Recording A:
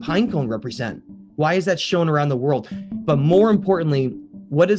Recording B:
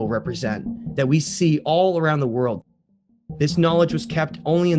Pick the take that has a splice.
B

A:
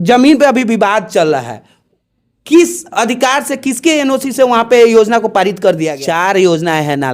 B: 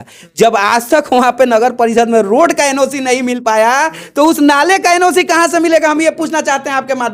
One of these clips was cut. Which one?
A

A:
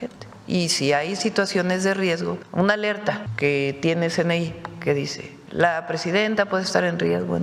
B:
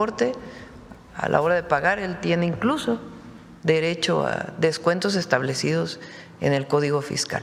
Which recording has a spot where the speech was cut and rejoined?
A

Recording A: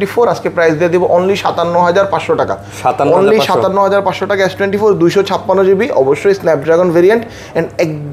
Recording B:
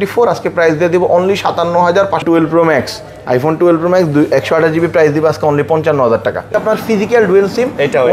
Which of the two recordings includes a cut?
B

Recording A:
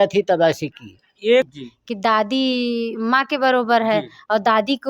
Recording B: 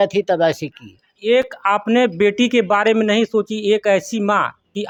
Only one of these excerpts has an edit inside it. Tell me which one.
A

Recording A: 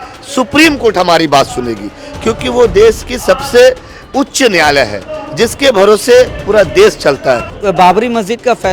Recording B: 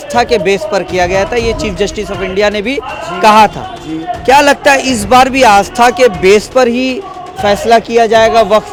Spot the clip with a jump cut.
A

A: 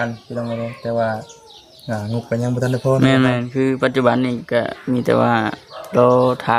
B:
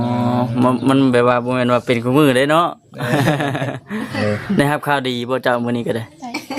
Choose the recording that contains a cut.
B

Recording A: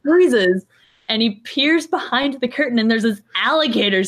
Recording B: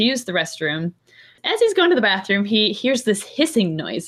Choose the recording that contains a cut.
B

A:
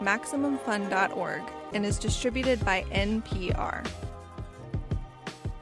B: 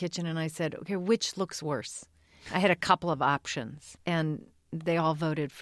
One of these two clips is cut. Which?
B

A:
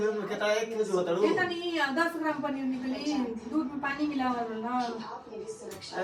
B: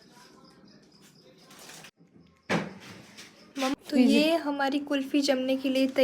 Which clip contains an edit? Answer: B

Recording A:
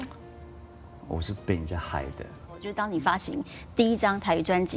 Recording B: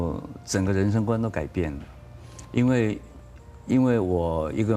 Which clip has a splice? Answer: A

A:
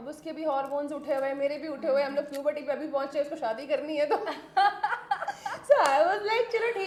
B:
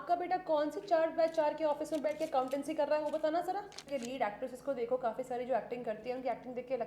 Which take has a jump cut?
B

